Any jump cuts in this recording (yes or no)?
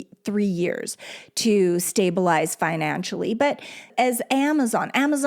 yes